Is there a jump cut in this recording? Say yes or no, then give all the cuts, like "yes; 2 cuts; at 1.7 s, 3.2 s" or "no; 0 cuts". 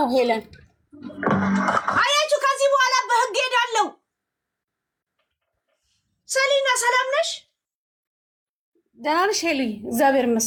no; 0 cuts